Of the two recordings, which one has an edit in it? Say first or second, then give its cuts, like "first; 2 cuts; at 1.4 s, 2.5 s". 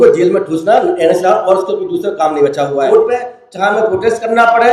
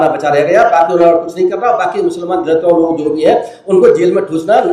first; 1 cut; at 2.9 s